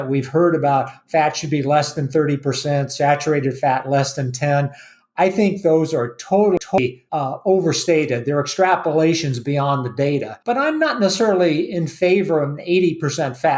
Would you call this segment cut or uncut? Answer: cut